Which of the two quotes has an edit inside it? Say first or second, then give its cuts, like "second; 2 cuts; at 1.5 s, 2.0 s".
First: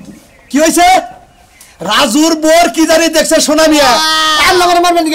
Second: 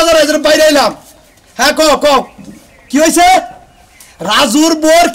first; 1 cut; at 4.2 s